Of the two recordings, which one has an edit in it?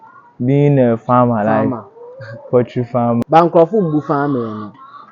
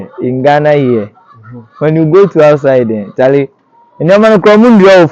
first; 1 cut; at 3.2 s

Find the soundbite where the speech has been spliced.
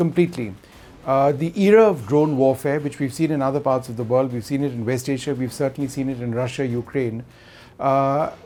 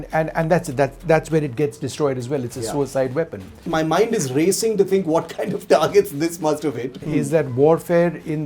second; 2 cuts; at 3.6 s, 6.9 s

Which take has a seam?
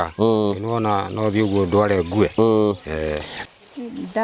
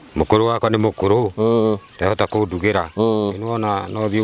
first; 1 cut; at 3.3 s

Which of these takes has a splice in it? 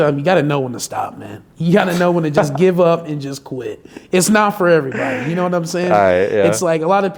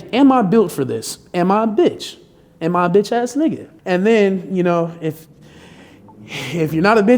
second; 1 cut; at 3.7 s

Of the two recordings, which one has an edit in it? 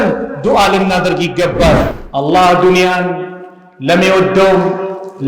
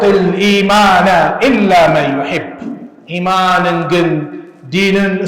first; 1 cut; at 2.0 s

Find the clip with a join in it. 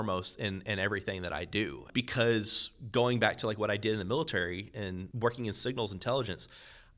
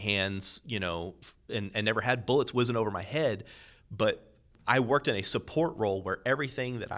first; 2 cuts; at 1.8 s, 5.1 s

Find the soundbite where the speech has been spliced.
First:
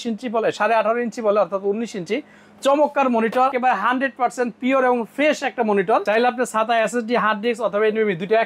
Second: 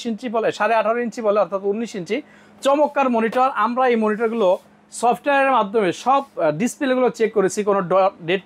first; 2 cuts; at 3.5 s, 6.0 s

